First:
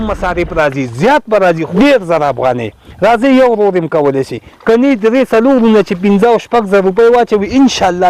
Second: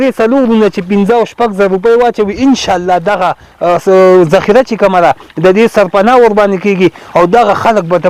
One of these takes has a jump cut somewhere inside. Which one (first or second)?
first